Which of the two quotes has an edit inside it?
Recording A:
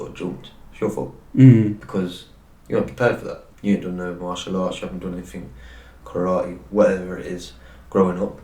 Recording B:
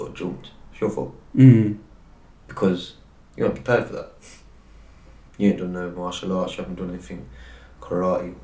A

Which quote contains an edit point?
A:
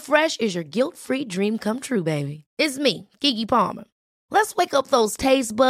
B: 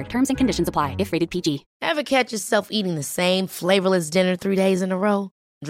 B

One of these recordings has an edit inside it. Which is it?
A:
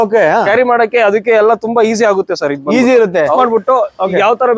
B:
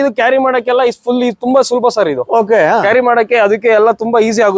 A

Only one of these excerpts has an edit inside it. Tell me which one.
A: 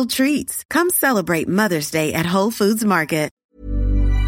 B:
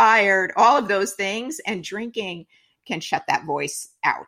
A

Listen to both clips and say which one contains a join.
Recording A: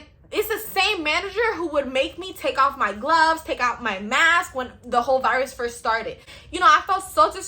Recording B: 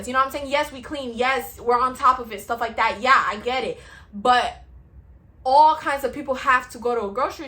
A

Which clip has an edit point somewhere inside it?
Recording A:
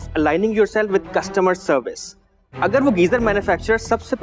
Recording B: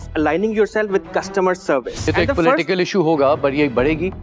B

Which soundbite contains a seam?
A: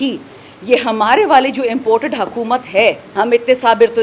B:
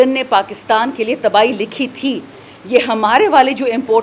A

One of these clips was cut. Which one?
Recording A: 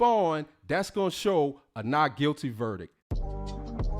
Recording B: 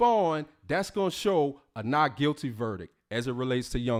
A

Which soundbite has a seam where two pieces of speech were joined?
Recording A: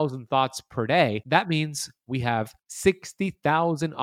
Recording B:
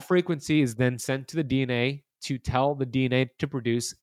A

